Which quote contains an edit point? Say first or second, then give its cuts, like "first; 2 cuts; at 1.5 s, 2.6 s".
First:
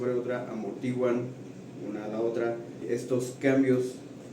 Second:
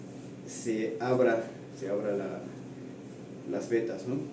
first; 1 cut; at 2.8 s